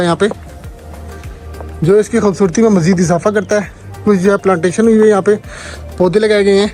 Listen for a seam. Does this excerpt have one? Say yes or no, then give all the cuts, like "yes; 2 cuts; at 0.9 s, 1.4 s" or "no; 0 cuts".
no; 0 cuts